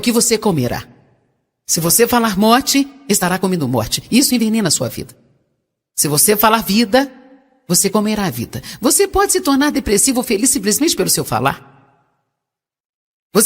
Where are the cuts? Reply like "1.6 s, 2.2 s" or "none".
1.8 s